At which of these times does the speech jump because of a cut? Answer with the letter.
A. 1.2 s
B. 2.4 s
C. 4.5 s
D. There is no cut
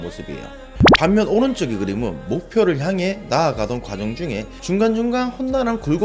C